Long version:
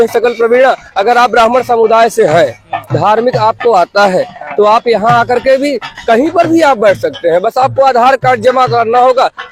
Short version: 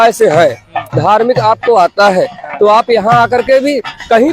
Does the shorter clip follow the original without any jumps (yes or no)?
yes